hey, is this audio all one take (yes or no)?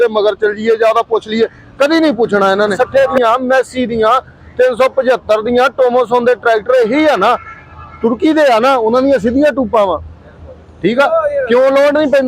no